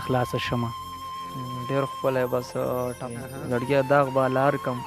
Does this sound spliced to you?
yes; 1 cut; at 3.1 s

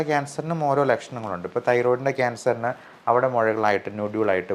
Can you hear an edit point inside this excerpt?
no; 0 cuts

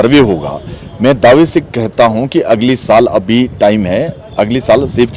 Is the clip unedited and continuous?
yes; 0 cuts

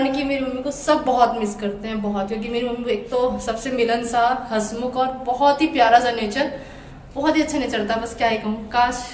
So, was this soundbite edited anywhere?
no; 0 cuts

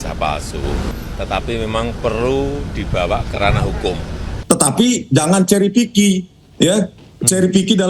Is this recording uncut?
no; 2 cuts; at 1.0 s, 4.3 s

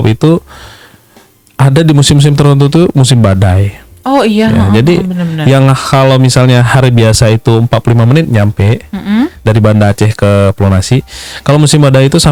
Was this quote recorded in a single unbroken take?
yes; 0 cuts

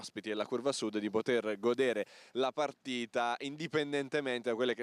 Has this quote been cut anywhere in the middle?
yes; 1 cut; at 3.3 s

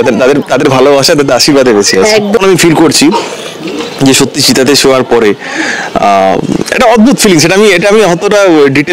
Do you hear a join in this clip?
yes; 1 cut; at 2.4 s

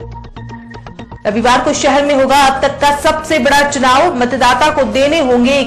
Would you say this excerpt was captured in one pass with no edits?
no; 1 cut; at 1.2 s

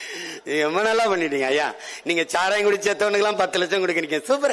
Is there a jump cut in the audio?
no; 0 cuts

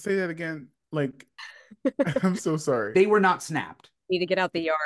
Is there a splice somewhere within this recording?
no; 0 cuts

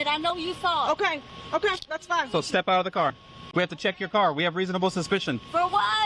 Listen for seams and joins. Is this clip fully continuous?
no; 1 cut; at 3.2 s

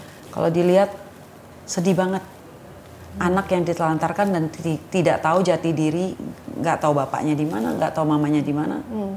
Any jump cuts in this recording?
no; 0 cuts

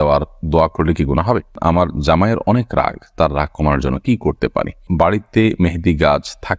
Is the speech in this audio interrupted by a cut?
yes; 2 cuts; at 1.6 s, 4.9 s

